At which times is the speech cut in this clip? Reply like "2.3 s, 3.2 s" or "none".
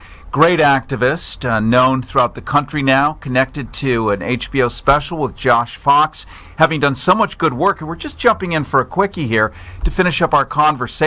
4.2 s

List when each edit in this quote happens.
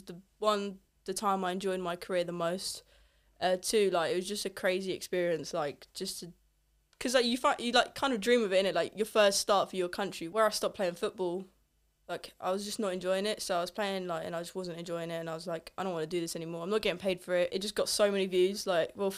10.2 s, 17.5 s

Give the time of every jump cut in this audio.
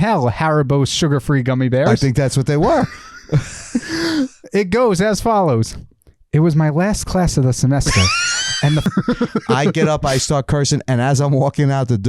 8.8 s

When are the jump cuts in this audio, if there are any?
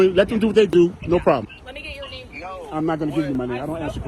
1.5 s

